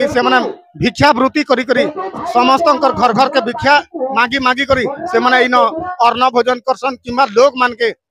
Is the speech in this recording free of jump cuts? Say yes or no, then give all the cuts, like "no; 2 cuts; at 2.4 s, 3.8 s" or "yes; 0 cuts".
yes; 0 cuts